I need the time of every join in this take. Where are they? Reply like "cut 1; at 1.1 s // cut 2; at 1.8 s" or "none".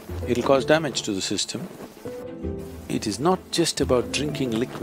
cut 1; at 2.3 s